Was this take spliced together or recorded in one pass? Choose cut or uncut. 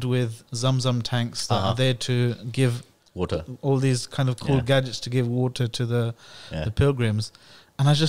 uncut